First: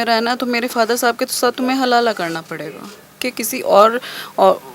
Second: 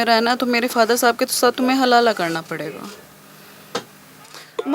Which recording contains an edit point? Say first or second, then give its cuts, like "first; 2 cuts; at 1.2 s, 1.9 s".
first; 1 cut; at 3.3 s